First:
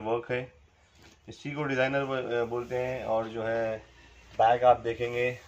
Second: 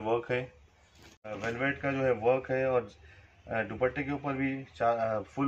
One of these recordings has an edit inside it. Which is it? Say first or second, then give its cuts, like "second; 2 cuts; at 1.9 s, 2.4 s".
second; 1 cut; at 1.3 s